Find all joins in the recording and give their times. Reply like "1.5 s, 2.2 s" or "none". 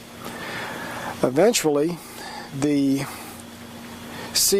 3.3 s